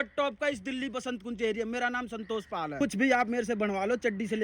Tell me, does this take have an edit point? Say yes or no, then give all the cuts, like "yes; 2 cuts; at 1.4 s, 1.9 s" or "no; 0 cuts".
yes; 1 cut; at 2.7 s